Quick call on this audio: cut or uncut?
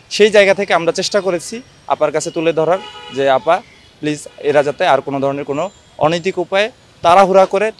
uncut